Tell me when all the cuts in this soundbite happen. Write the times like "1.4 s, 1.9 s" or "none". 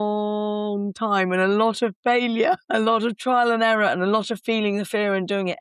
none